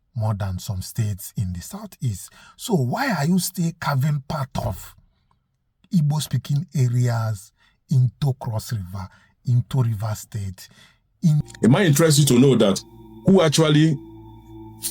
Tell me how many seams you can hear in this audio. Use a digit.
1